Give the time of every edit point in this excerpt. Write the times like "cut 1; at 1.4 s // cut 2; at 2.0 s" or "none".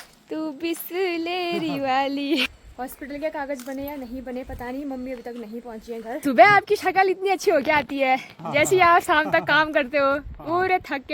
cut 1; at 2.5 s // cut 2; at 6.2 s

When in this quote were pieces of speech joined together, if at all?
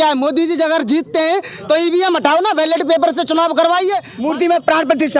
cut 1; at 4.1 s

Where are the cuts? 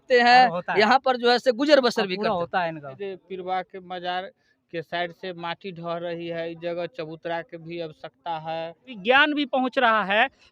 cut 1; at 2.9 s // cut 2; at 8.9 s

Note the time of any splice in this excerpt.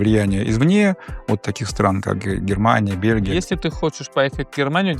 cut 1; at 3.3 s

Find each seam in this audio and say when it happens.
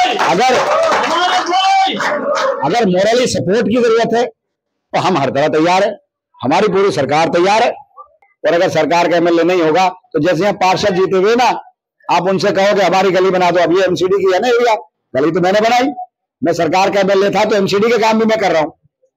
cut 1; at 8.3 s

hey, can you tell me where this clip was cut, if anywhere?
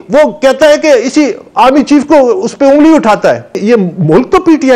cut 1; at 3.6 s

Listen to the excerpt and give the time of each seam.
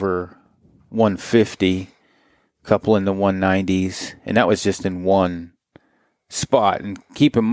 none

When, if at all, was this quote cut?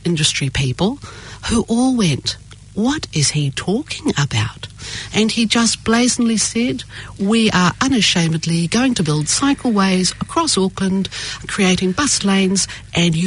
cut 1; at 11.4 s

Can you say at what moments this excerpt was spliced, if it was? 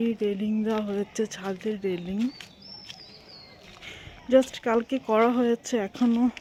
none

